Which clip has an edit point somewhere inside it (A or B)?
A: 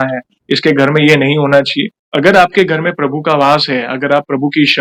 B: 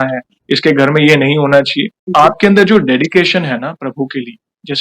B